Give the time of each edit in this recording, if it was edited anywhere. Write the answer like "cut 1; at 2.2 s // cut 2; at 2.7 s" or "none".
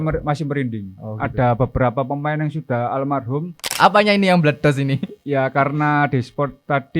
cut 1; at 3.7 s